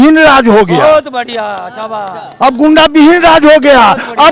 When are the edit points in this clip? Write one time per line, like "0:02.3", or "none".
none